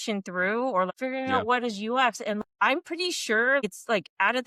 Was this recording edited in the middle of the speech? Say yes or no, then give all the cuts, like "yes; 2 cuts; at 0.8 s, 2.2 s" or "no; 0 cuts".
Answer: yes; 3 cuts; at 0.9 s, 2.4 s, 3.6 s